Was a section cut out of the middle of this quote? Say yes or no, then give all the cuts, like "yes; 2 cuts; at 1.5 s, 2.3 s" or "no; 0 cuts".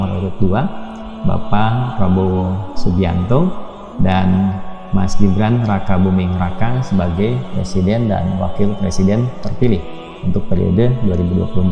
no; 0 cuts